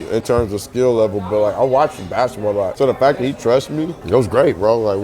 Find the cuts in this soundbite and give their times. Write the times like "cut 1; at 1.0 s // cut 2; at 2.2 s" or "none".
cut 1; at 2.7 s // cut 2; at 4.0 s